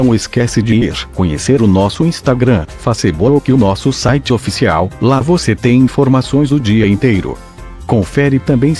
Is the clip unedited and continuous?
yes; 0 cuts

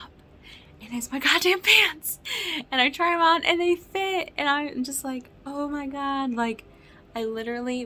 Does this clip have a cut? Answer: no; 0 cuts

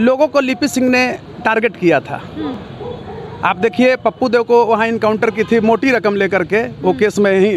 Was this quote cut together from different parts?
no; 0 cuts

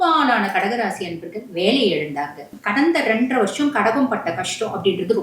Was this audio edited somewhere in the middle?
yes; 1 cut; at 2.6 s

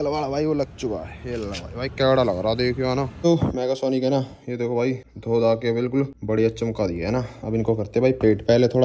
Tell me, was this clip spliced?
yes; 3 cuts; at 3.2 s, 5.1 s, 6.2 s

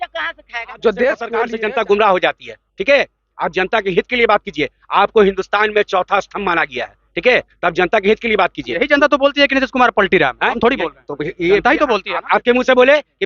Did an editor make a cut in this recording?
yes; 2 cuts; at 1.4 s, 8.7 s

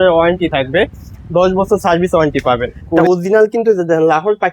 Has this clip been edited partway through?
yes; 1 cut; at 3.0 s

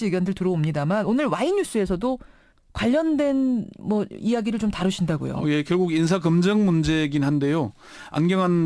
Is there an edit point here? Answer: yes; 1 cut; at 4.6 s

